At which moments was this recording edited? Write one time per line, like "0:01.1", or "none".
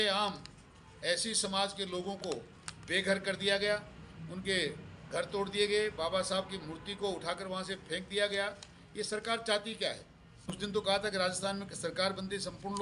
0:10.5